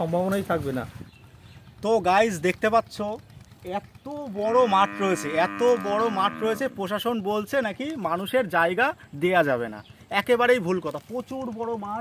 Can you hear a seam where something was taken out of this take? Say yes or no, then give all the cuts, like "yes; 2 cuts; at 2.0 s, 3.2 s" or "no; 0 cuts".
yes; 1 cut; at 1.6 s